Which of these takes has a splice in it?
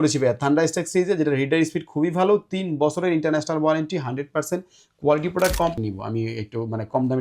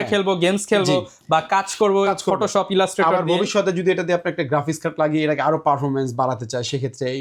first; 1 cut; at 5.7 s

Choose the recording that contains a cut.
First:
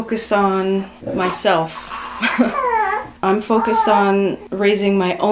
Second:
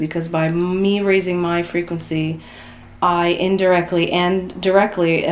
first; 3 cuts; at 1.0 s, 3.1 s, 4.4 s

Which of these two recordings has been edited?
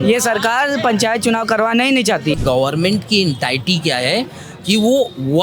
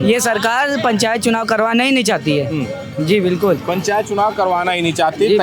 first; 1 cut; at 2.3 s

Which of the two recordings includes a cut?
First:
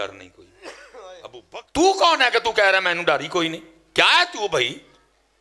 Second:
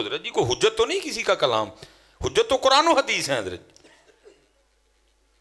first; 1 cut; at 1.3 s

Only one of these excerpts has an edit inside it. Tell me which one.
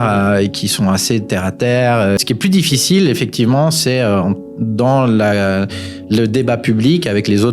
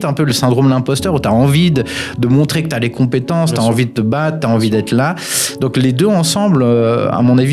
first; 1 cut; at 2.2 s

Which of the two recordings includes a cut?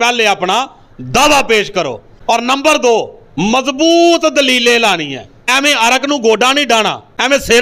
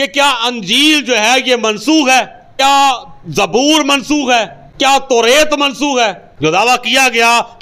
second; 1 cut; at 6.2 s

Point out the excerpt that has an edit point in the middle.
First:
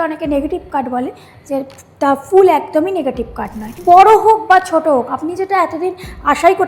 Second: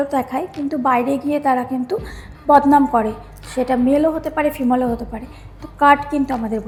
first; 1 cut; at 3.8 s

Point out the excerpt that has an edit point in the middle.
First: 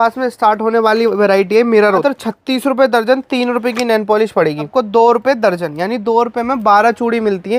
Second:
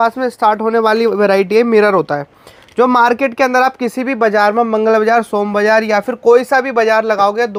first; 2 cuts; at 2.0 s, 4.7 s

